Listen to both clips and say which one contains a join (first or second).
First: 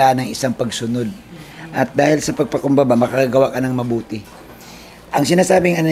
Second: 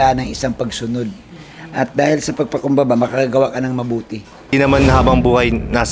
second